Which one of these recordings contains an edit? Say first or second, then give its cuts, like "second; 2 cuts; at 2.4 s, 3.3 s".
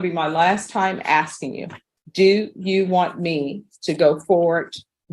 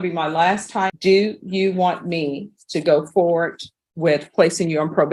second; 1 cut; at 1.0 s